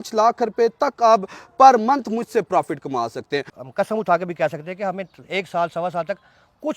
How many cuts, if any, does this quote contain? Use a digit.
1